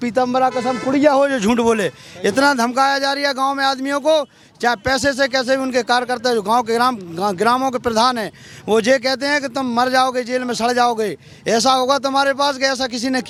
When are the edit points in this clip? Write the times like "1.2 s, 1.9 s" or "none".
none